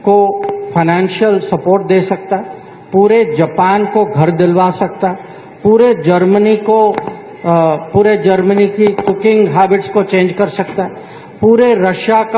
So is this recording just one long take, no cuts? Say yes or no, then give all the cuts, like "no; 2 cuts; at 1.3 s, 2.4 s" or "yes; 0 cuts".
yes; 0 cuts